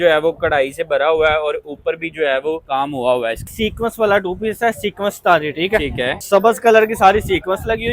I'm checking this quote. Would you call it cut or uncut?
cut